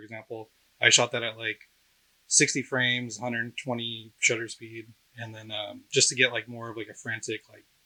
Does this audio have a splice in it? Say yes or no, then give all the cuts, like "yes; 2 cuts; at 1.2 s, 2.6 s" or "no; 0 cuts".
no; 0 cuts